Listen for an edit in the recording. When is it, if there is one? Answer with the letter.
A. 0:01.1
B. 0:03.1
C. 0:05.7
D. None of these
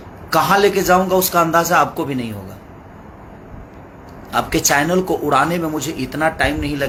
D